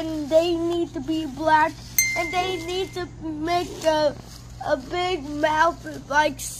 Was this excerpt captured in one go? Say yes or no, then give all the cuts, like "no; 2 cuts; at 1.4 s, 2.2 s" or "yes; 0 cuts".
yes; 0 cuts